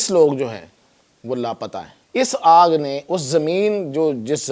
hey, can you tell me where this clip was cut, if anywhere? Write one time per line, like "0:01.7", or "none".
0:01.9